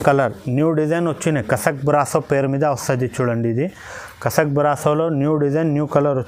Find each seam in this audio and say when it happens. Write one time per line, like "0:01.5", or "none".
none